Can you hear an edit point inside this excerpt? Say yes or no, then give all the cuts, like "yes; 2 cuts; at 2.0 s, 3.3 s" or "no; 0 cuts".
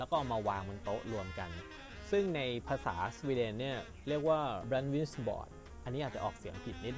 yes; 1 cut; at 4.6 s